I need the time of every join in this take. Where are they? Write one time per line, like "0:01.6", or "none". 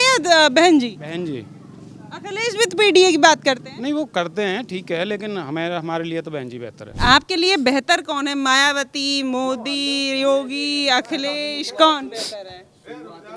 0:06.9